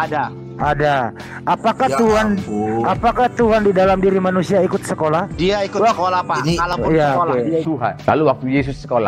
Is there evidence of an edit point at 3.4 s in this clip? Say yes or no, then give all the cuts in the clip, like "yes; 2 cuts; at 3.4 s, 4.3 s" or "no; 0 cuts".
no; 1 cut; at 7.6 s